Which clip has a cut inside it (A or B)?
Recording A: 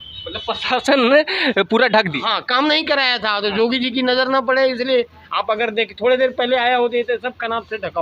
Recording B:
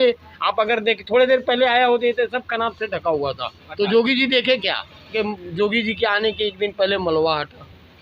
B